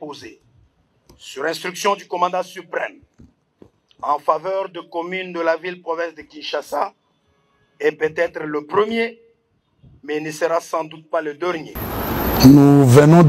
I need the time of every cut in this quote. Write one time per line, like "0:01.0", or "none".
0:11.8